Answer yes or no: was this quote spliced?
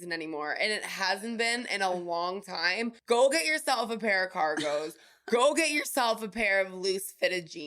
yes